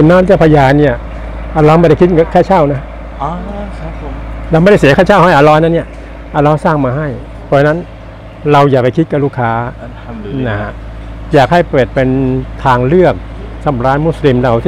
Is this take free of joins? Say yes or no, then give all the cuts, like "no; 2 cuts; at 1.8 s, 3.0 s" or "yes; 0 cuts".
yes; 0 cuts